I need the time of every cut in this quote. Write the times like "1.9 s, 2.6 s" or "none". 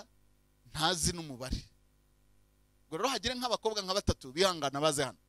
none